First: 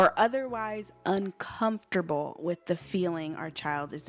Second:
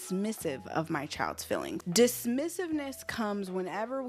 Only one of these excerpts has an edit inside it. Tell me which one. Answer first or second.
second